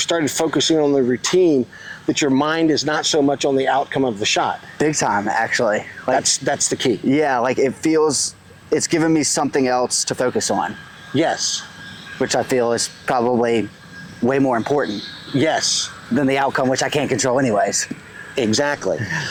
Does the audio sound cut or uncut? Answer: uncut